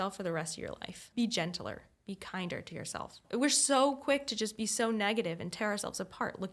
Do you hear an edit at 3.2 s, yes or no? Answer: yes